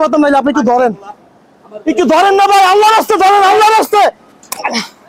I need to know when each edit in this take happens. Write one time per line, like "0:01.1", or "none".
none